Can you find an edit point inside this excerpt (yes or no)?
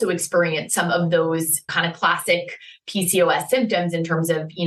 yes